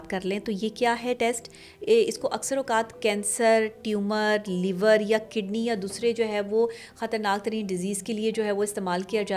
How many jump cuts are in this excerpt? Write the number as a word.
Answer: zero